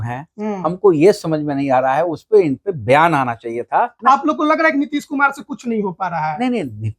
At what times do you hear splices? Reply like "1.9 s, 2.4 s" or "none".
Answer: 3.9 s

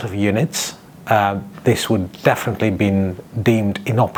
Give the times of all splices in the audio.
none

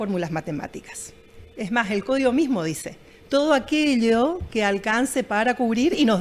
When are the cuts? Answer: none

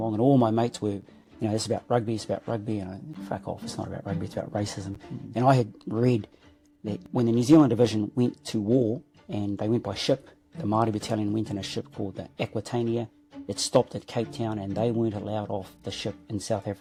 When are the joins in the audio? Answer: none

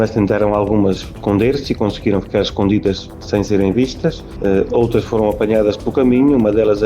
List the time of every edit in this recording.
1.1 s, 3.1 s, 4.3 s

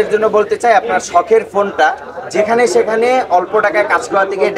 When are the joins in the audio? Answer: none

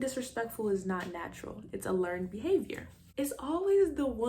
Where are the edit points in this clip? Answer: 2.8 s

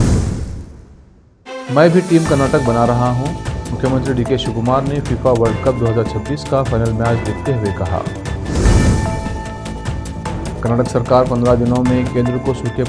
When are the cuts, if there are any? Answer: 1.4 s

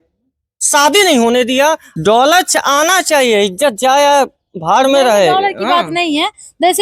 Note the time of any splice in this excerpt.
1.9 s

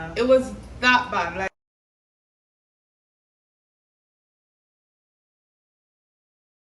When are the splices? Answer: none

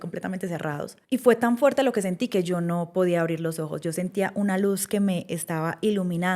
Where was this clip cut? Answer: 1.0 s

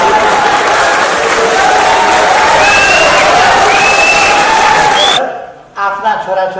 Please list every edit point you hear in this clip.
5.2 s

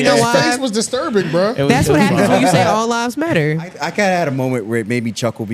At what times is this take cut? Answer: 3.8 s

